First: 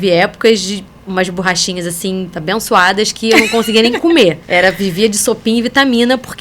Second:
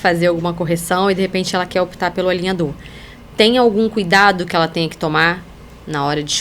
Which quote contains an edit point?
first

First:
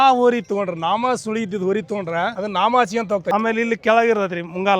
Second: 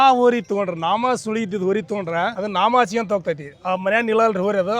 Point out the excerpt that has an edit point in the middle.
first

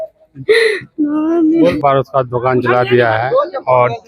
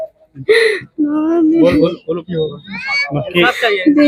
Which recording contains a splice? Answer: first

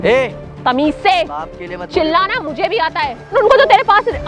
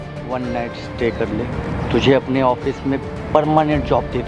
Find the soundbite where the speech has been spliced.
first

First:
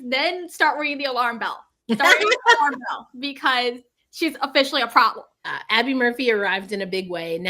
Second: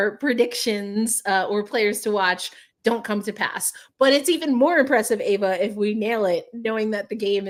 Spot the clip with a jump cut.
first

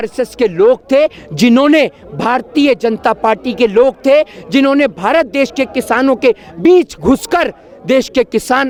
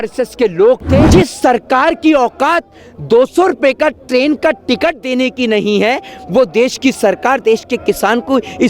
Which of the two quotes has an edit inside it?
second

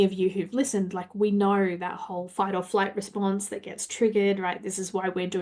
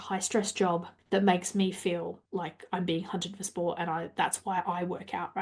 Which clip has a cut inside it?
second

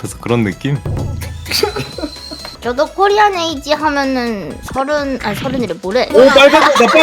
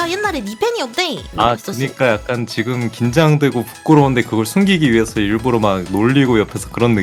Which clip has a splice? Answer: first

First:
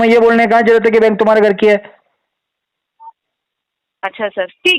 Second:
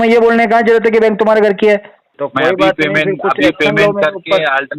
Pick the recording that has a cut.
second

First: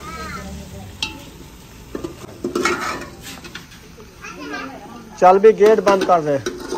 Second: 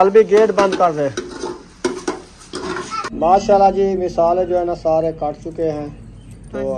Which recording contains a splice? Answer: second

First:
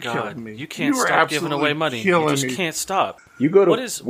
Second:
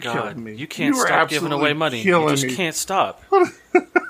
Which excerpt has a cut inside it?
first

